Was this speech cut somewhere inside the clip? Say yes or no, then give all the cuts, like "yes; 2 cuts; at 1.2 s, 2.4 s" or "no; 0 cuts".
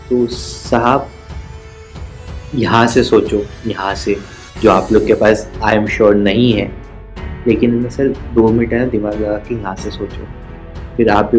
no; 0 cuts